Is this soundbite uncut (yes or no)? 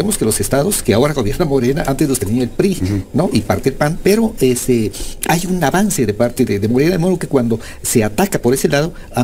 yes